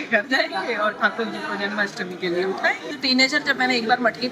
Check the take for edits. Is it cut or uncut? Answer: cut